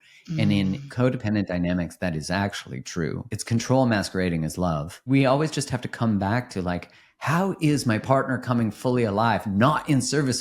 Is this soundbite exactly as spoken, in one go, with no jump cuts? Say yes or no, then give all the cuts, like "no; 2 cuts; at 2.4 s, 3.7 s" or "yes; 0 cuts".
no; 1 cut; at 3.3 s